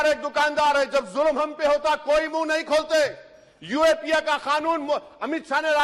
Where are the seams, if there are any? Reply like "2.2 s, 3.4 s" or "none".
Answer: none